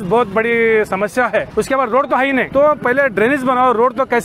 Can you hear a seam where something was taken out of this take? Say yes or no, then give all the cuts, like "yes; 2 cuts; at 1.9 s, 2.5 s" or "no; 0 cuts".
yes; 2 cuts; at 1.5 s, 2.5 s